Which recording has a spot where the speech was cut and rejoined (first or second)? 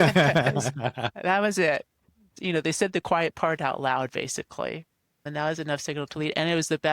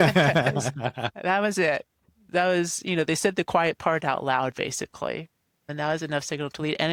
first